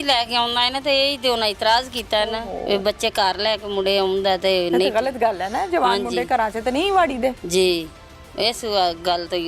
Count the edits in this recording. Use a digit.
0